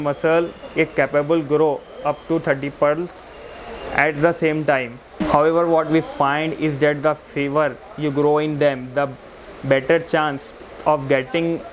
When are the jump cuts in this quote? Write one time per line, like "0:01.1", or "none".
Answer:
none